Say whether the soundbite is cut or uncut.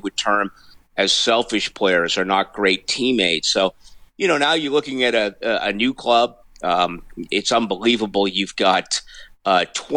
uncut